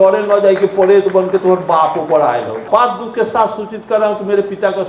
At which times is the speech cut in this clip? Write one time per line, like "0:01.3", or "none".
0:02.6

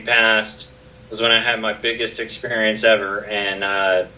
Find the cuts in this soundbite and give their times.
0:02.7

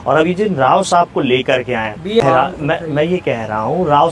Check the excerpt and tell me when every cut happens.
0:02.2

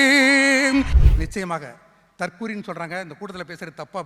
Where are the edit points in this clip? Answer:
0:01.0

